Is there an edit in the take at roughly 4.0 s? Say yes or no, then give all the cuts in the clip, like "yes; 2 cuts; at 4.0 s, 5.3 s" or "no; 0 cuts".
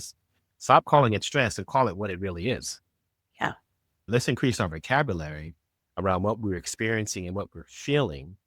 yes; 1 cut; at 4.0 s